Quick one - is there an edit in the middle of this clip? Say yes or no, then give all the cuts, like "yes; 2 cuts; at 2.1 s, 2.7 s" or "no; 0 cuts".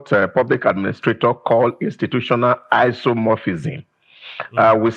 no; 0 cuts